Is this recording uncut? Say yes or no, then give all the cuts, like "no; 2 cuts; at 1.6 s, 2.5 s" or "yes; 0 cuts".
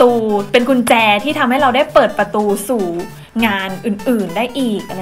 yes; 0 cuts